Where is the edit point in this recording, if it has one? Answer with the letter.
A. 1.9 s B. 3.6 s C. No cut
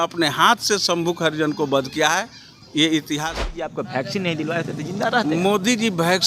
B